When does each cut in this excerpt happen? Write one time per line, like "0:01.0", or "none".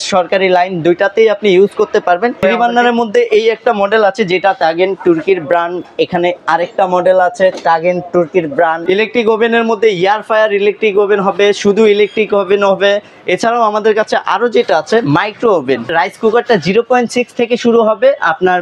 0:02.4
0:08.8
0:15.9